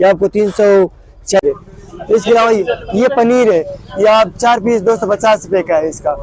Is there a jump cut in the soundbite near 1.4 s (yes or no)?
yes